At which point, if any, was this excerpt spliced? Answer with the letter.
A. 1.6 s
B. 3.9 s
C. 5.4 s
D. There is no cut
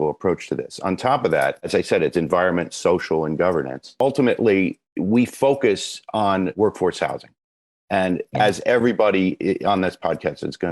B